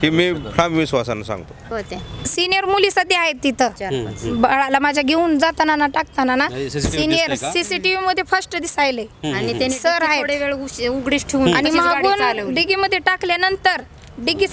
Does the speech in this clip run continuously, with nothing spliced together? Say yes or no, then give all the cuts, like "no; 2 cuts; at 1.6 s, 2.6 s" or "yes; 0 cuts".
no; 1 cut; at 1.9 s